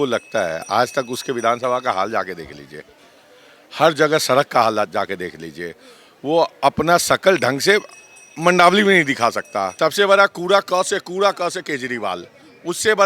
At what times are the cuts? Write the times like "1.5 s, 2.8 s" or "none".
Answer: 9.7 s